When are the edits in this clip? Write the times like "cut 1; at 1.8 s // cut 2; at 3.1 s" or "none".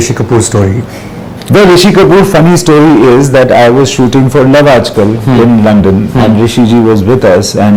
none